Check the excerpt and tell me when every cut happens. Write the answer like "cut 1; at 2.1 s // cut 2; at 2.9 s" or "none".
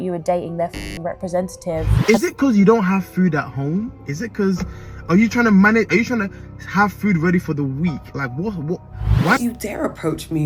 cut 1; at 1.9 s // cut 2; at 9.4 s